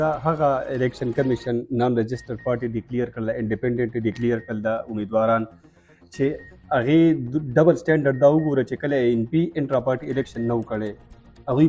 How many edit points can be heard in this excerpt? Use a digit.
0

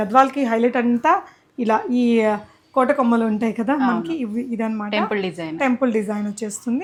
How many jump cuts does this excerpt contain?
0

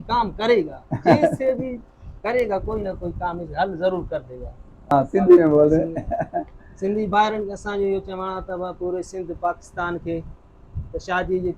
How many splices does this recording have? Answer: 1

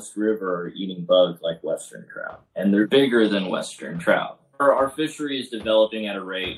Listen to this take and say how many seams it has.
2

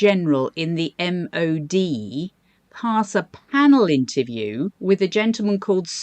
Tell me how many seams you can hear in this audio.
1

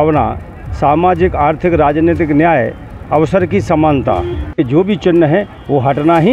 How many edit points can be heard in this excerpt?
1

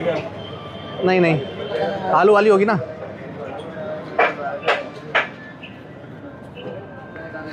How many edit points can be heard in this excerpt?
0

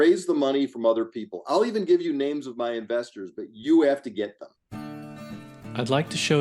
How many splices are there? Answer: 1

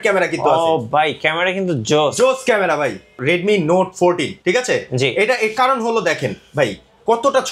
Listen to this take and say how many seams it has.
1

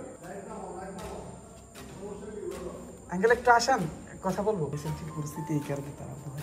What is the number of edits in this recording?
1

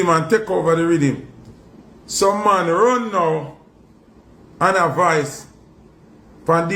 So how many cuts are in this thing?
0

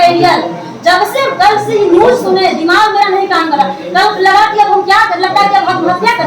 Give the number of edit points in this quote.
0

